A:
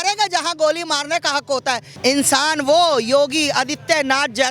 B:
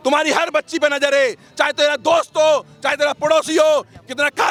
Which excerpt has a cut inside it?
A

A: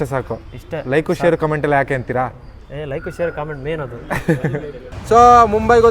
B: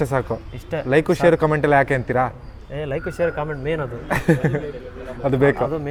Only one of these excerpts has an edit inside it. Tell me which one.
A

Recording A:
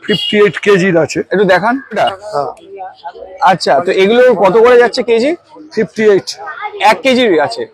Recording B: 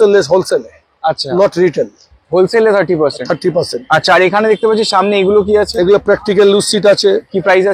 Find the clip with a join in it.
A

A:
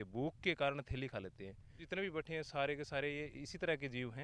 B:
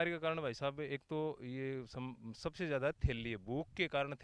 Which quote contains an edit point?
A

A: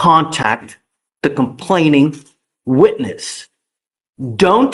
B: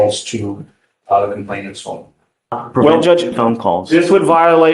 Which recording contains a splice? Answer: B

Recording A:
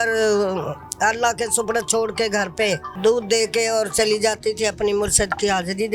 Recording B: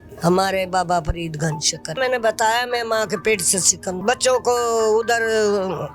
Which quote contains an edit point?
B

